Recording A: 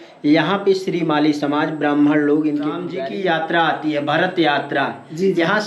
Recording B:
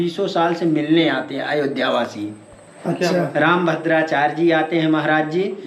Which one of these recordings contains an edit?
A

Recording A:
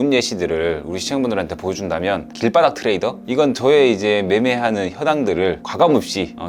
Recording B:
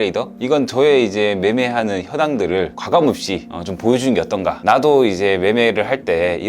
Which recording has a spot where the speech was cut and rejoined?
B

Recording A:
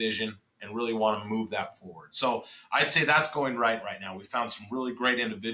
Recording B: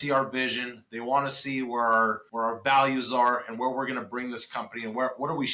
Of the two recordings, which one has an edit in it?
B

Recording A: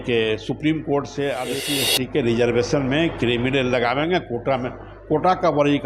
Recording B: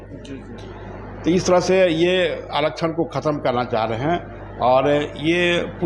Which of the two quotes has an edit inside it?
A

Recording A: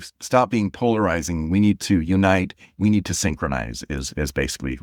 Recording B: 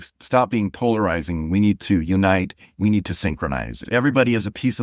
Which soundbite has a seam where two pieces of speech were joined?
B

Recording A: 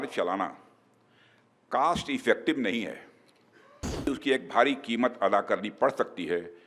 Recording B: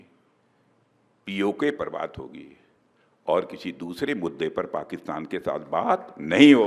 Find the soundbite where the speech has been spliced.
A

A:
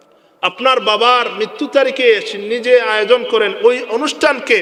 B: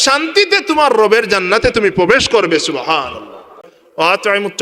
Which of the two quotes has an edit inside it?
B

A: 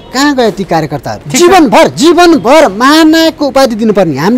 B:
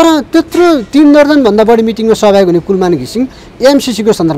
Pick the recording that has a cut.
A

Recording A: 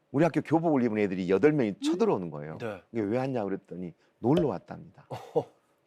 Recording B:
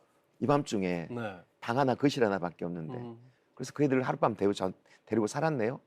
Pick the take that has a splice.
B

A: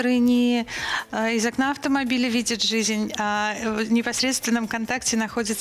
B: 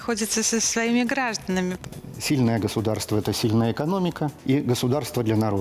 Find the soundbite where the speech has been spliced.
B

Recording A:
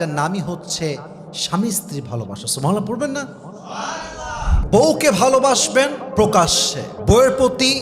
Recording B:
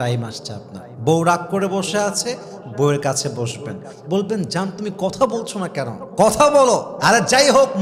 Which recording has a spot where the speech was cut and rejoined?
A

